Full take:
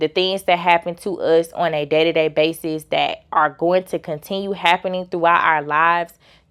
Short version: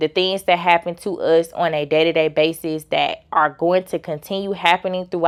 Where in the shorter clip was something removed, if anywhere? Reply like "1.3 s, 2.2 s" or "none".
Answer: none